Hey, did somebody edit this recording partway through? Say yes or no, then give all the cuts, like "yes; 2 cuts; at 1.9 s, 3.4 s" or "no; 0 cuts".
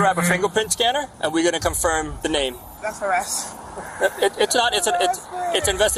yes; 2 cuts; at 1.1 s, 2.4 s